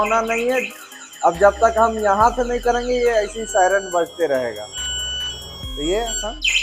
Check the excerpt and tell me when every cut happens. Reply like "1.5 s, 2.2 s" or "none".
none